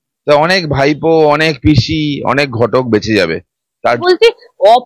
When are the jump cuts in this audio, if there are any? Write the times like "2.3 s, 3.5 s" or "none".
3.8 s